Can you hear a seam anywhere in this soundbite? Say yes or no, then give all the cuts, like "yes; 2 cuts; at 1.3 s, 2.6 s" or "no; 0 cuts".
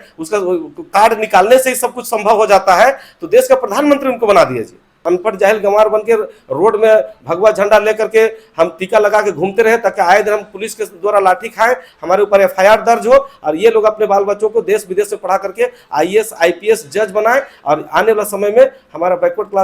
yes; 1 cut; at 5.0 s